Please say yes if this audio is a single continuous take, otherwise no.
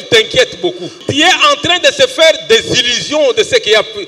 no